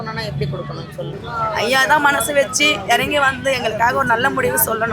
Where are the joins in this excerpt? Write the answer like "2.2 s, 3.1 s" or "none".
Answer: 1.2 s